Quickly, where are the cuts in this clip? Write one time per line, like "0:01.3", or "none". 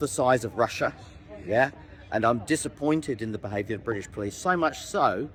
none